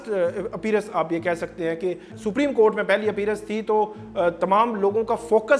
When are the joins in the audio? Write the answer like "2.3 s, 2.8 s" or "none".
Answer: none